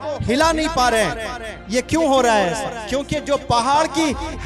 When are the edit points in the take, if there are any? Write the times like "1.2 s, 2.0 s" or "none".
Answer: none